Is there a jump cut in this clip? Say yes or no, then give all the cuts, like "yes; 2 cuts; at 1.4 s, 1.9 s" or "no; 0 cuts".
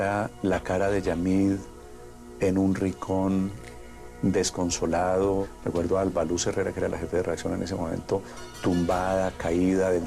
no; 0 cuts